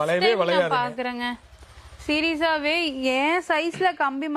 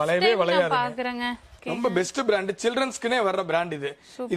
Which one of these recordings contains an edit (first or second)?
second